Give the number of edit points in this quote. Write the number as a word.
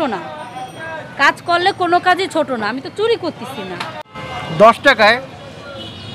one